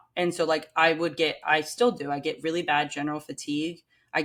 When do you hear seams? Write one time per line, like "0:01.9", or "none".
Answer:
none